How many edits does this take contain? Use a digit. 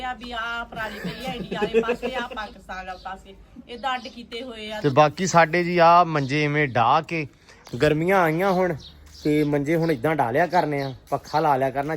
1